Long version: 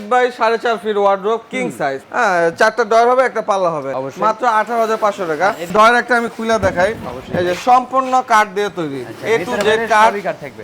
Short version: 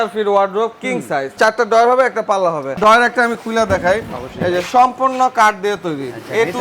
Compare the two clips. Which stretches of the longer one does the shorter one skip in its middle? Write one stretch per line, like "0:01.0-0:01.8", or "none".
0:02.0-0:02.5
0:03.9-0:05.6